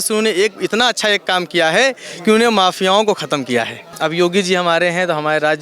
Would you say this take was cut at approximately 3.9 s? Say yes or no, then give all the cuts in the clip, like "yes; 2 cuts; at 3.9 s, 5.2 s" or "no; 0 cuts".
yes; 1 cut; at 3.9 s